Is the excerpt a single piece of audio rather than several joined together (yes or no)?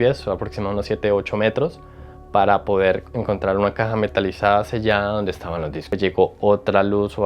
no